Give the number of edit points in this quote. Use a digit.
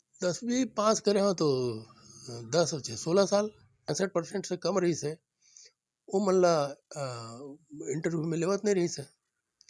1